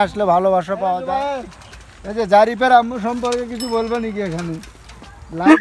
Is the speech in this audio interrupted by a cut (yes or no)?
yes